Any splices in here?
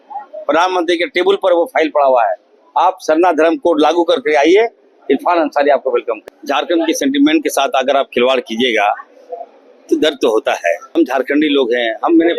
yes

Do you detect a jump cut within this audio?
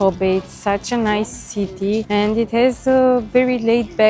yes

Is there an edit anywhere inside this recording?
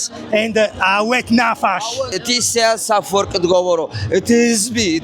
yes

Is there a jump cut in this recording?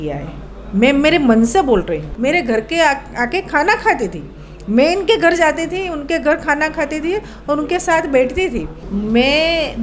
yes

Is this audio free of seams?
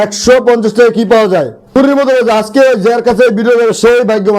no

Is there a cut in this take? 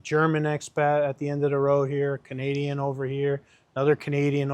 no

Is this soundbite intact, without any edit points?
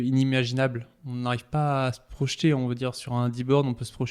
yes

